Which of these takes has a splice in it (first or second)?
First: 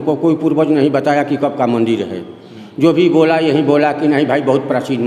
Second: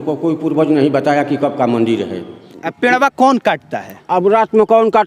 second